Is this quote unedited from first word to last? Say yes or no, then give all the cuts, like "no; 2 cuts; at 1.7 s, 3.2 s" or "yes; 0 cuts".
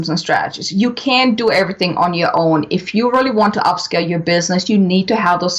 yes; 0 cuts